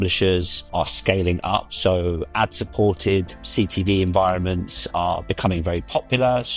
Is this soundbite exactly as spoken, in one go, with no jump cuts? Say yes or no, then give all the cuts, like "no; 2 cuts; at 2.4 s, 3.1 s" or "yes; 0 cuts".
yes; 0 cuts